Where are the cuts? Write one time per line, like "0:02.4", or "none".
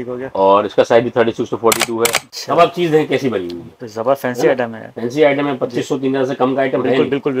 0:02.3